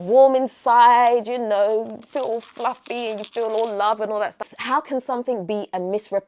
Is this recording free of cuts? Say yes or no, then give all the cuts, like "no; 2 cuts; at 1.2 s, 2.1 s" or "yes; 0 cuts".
no; 1 cut; at 4.5 s